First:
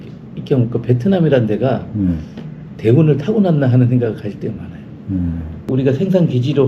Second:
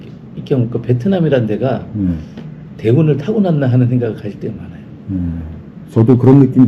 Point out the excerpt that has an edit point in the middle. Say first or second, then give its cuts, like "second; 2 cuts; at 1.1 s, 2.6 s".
first; 1 cut; at 5.7 s